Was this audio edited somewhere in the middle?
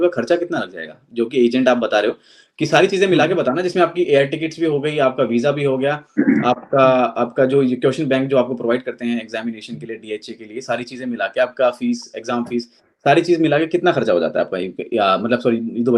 no; 0 cuts

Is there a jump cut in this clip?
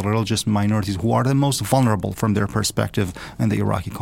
no; 0 cuts

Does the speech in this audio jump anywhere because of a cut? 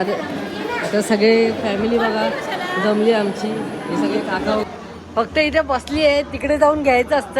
yes; 1 cut; at 4.6 s

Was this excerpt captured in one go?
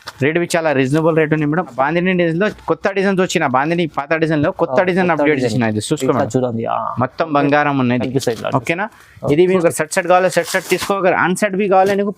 no; 2 cuts; at 1.8 s, 9.5 s

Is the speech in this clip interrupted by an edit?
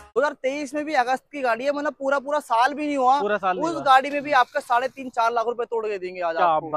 no; 0 cuts

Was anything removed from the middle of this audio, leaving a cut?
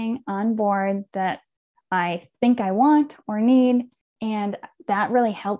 yes; 1 cut; at 4.0 s

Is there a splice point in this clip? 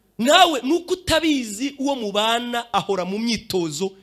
no; 0 cuts

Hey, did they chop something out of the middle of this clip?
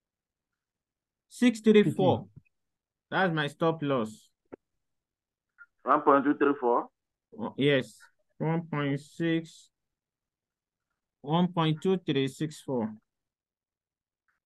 no; 0 cuts

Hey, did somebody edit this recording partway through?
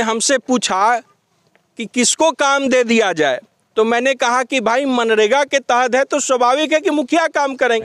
no; 0 cuts

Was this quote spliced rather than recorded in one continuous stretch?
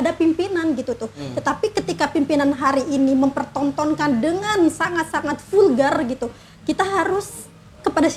no; 0 cuts

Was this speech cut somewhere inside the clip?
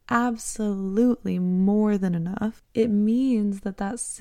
yes; 1 cut; at 2.6 s

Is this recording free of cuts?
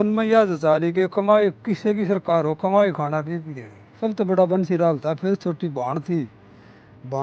no; 1 cut; at 4.0 s

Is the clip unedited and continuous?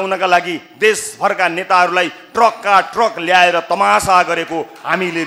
yes; 0 cuts

